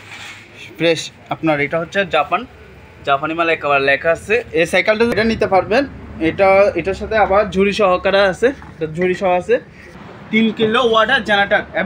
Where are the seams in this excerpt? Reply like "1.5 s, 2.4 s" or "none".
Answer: 5.2 s, 10.0 s